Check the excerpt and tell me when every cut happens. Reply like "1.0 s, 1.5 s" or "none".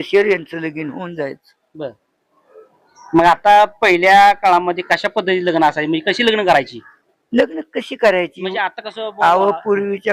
none